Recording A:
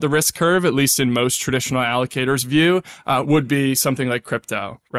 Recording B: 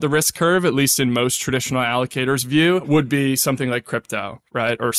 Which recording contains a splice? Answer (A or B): B